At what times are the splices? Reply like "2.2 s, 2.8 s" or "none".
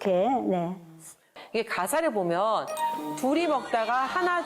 1.4 s